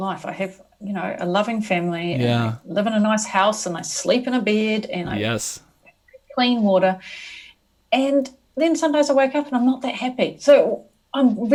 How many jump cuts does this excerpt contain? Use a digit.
0